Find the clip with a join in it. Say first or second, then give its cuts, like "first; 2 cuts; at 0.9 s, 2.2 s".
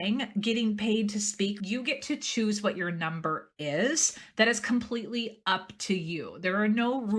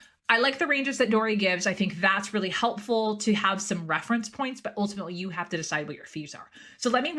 first; 1 cut; at 1.6 s